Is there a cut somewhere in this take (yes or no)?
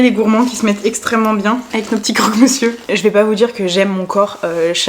yes